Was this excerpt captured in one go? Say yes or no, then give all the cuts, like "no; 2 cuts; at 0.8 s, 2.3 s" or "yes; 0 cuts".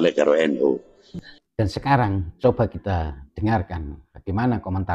no; 1 cut; at 1.1 s